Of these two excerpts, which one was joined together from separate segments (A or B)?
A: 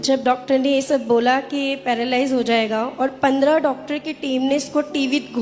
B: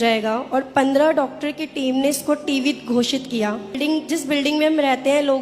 B